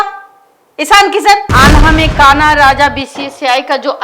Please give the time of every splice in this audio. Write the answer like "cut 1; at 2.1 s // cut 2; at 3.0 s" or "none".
cut 1; at 1.5 s

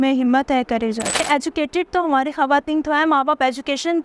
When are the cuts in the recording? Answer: cut 1; at 1.2 s

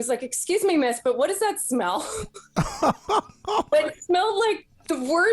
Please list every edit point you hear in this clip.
cut 1; at 3.7 s

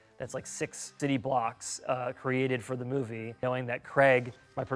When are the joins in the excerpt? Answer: cut 1; at 0.9 s // cut 2; at 3.3 s

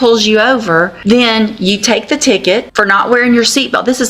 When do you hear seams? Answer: cut 1; at 1.0 s // cut 2; at 2.7 s

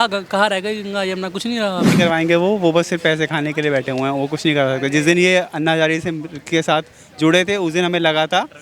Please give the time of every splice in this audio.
cut 1; at 1.9 s

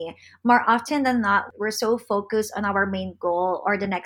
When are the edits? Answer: cut 1; at 1.5 s

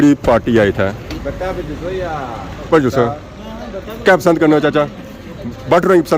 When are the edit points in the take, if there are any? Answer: cut 1; at 1.1 s // cut 2; at 2.7 s

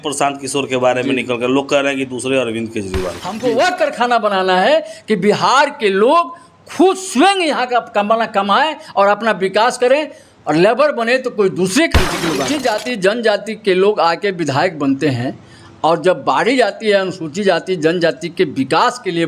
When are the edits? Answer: cut 1; at 3.3 s // cut 2; at 12.4 s

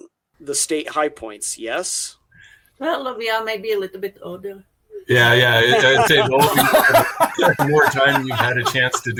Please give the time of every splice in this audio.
none

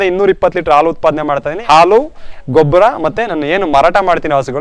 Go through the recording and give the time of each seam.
cut 1; at 1.5 s

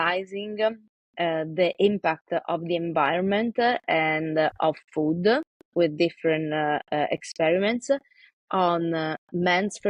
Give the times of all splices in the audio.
none

